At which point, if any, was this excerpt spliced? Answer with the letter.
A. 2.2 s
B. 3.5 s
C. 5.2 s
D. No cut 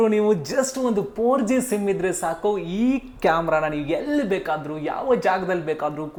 D